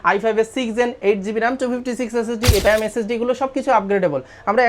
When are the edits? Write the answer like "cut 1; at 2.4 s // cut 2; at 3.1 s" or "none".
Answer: cut 1; at 2.7 s